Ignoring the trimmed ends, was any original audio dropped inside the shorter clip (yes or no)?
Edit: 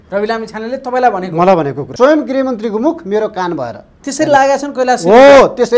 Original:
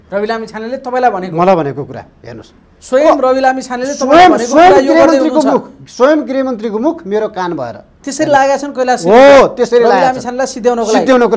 yes